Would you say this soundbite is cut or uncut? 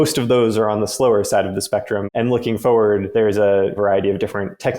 cut